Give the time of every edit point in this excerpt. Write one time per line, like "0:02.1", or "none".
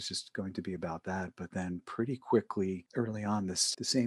0:02.8